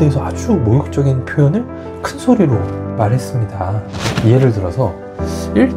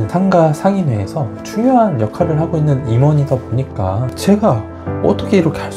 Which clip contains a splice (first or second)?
first